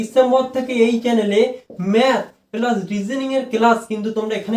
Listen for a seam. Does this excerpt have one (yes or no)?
no